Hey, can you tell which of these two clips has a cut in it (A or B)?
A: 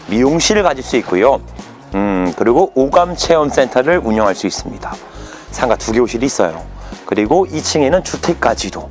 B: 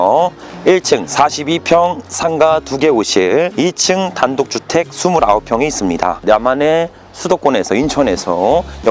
B